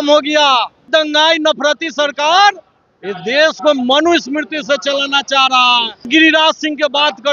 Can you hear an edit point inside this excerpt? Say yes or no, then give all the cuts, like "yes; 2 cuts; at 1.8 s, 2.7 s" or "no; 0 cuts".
yes; 2 cuts; at 0.9 s, 6.0 s